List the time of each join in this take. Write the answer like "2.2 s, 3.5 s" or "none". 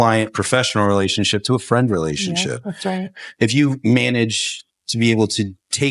3.2 s